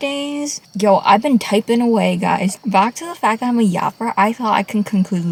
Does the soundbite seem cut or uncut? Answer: uncut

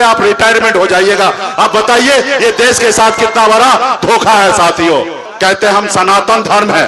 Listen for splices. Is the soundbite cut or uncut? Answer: cut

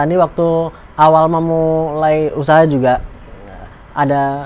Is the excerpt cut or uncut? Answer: uncut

